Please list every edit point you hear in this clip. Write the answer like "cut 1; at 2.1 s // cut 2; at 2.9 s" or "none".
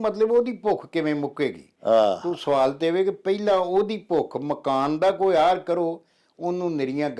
none